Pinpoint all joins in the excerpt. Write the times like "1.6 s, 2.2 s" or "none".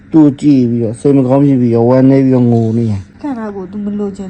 3.2 s